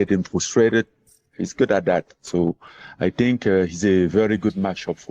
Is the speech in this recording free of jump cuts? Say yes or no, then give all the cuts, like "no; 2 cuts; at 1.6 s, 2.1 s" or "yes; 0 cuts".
no; 1 cut; at 3.1 s